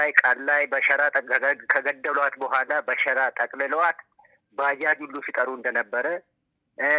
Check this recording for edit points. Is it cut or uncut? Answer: uncut